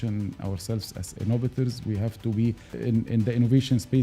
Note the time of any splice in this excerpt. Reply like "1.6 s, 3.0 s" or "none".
1.0 s, 2.7 s

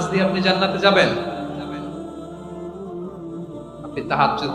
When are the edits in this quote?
1.3 s, 3.6 s

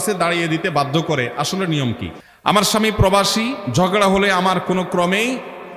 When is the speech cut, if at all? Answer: 2.1 s

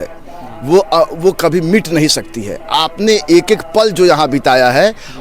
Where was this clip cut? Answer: none

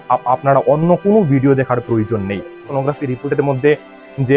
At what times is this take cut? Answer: 2.6 s

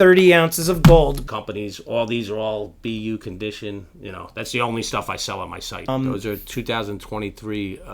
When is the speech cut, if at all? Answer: 1.2 s, 5.9 s

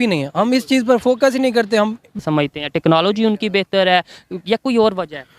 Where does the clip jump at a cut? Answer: 2.2 s

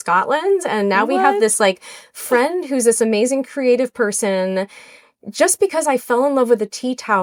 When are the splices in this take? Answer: none

